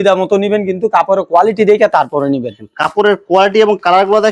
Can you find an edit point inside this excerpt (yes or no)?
no